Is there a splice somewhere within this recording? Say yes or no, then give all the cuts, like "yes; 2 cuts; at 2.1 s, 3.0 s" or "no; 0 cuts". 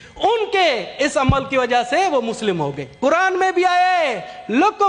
yes; 1 cut; at 2.8 s